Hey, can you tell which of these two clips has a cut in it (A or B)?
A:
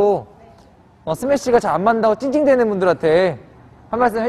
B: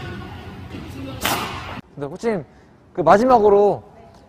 B